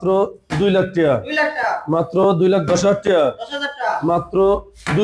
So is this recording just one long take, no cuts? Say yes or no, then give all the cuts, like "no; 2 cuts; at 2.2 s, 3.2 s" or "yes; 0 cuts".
yes; 0 cuts